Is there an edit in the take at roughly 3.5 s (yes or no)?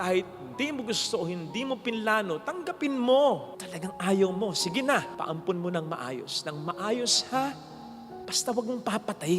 yes